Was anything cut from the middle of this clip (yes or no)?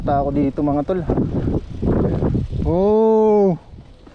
yes